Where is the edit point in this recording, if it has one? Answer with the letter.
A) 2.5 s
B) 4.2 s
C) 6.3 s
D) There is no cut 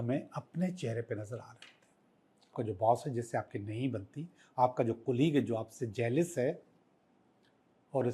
A